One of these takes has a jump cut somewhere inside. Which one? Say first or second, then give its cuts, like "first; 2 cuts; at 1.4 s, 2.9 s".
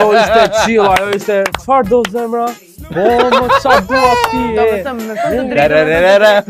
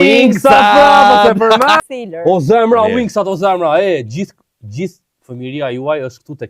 second; 1 cut; at 1.8 s